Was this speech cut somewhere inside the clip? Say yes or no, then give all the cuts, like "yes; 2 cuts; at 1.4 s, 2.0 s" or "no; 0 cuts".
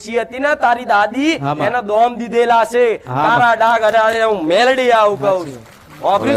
no; 0 cuts